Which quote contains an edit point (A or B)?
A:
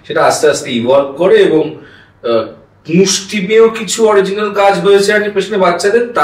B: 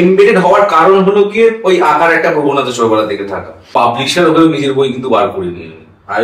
B